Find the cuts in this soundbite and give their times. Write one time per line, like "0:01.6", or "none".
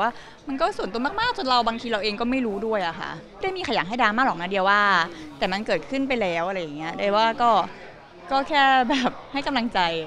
0:03.4